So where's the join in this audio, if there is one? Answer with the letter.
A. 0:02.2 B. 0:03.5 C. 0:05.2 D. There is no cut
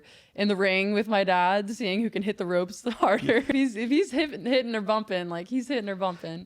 B